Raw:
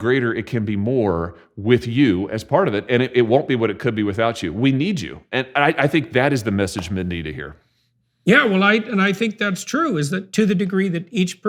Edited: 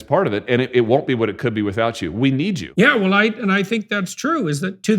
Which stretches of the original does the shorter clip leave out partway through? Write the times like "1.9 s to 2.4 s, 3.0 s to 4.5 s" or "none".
5.1 s to 8.1 s